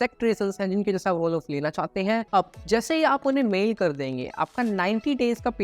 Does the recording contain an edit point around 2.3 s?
yes; 1 cut; at 2.3 s

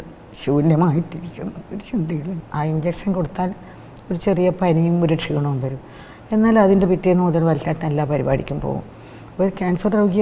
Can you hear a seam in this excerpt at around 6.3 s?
no; 1 cut; at 2.4 s

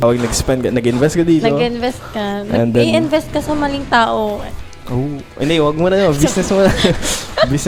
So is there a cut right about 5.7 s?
no; 0 cuts

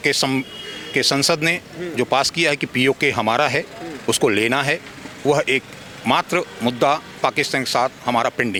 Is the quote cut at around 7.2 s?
no; 0 cuts

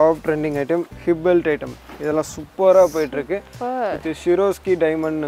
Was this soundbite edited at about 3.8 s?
no; 0 cuts

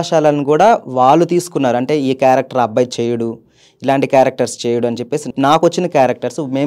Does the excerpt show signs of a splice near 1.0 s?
no; 1 cut; at 5.3 s

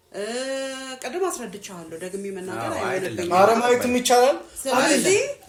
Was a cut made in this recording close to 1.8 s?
no; 0 cuts

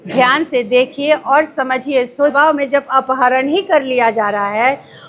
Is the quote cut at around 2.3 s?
yes; 1 cut; at 2.3 s

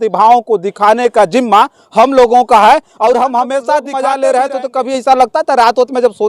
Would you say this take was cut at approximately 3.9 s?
yes; 1 cut; at 3.9 s

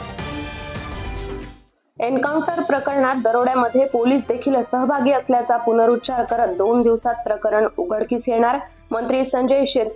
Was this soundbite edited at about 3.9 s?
no; 1 cut; at 1.3 s

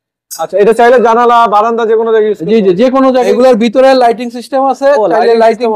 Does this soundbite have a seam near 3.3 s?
yes; 1 cut; at 3.3 s

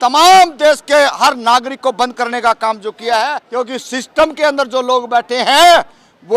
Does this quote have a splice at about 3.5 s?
yes; 1 cut; at 3.5 s

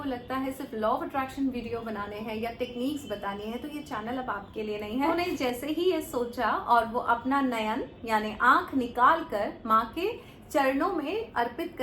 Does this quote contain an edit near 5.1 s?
yes; 1 cut; at 5.1 s

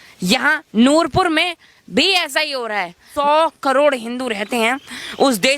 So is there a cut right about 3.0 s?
yes; 1 cut; at 3.0 s

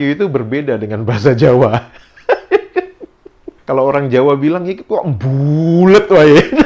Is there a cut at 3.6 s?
yes; 1 cut; at 3.6 s

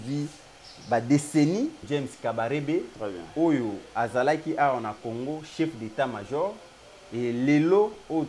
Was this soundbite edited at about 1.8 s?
yes; 1 cut; at 1.8 s

